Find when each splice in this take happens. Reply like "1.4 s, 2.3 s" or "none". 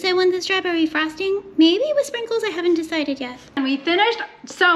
3.5 s

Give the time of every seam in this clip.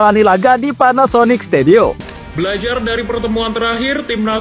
1.9 s

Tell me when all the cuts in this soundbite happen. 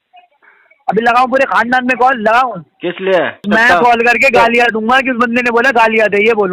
3.5 s

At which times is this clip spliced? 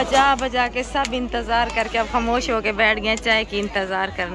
none

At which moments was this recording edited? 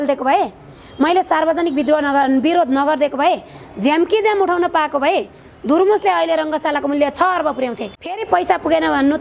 8.2 s

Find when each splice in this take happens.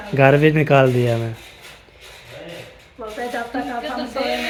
none

